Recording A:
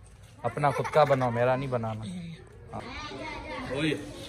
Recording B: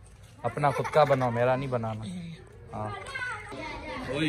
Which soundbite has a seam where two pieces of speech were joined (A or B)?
A